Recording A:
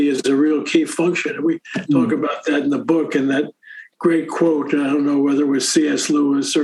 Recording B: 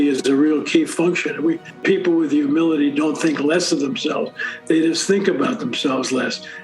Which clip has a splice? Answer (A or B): B